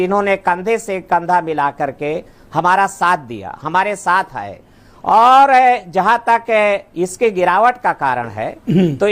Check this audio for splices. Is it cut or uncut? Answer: uncut